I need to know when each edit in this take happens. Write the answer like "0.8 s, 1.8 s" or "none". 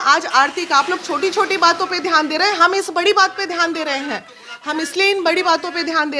none